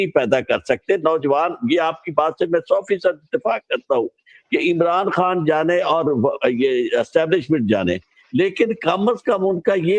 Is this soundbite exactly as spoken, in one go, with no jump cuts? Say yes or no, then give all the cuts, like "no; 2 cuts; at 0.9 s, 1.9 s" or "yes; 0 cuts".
yes; 0 cuts